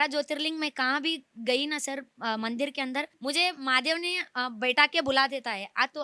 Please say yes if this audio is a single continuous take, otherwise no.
no